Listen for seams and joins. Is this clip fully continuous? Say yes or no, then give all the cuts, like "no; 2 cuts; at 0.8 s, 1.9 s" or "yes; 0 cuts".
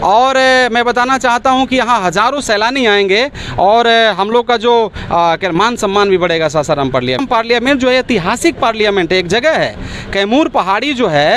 no; 1 cut; at 7.2 s